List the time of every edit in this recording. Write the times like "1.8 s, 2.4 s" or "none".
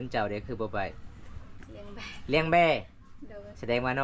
none

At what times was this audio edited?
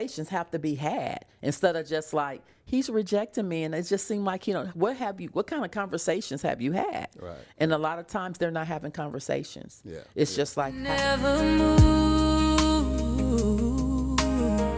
10.7 s

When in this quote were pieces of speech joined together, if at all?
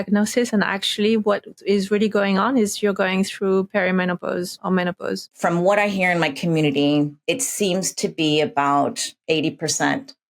4.5 s, 5.3 s, 7.2 s, 9.1 s

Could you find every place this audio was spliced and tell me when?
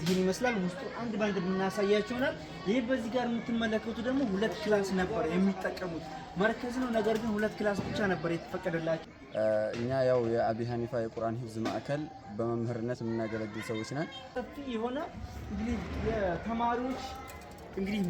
9.1 s, 14.3 s

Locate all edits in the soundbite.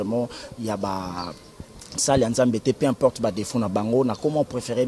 none

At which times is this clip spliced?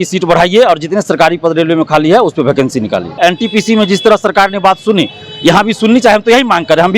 3.1 s

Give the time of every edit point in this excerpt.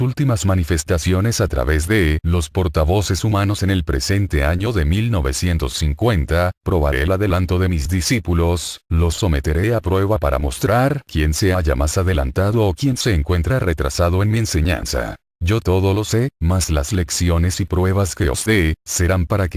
18.3 s

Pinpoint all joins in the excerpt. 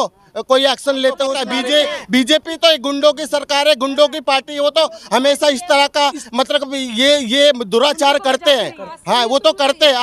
1.5 s

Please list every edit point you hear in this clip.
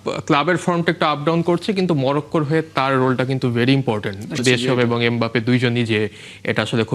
4.4 s

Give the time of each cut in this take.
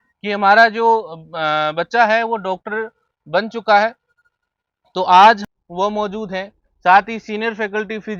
5.4 s

